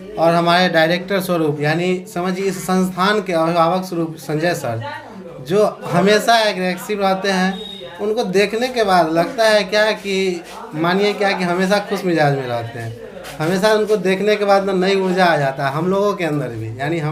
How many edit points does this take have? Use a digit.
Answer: 0